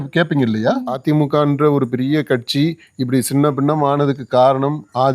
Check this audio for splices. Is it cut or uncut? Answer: cut